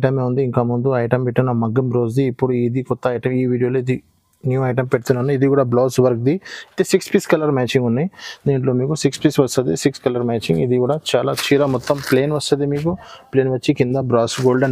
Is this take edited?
no; 0 cuts

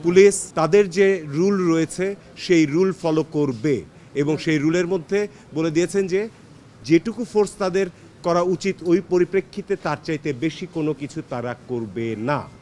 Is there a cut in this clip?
no; 0 cuts

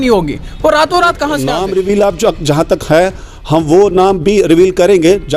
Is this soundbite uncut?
no; 1 cut; at 1.4 s

